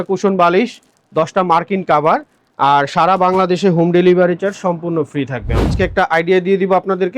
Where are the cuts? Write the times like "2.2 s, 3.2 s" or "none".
5.7 s